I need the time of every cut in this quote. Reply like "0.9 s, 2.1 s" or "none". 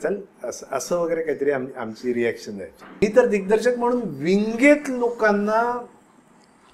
3.0 s